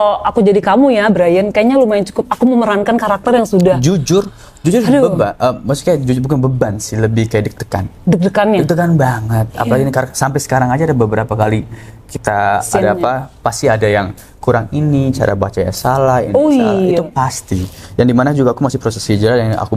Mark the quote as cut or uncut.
uncut